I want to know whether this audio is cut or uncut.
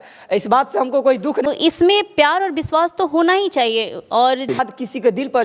cut